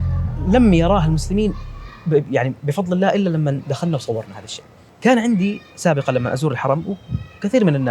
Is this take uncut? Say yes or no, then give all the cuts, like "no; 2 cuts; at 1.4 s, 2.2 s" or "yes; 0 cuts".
no; 1 cut; at 4.9 s